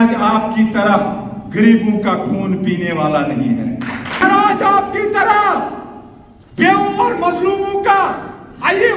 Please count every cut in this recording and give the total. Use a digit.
1